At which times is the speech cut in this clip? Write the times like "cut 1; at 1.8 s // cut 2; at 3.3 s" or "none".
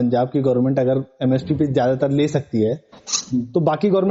none